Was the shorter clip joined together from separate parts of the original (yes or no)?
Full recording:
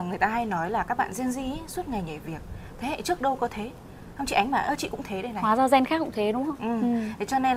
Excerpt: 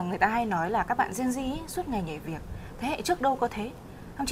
no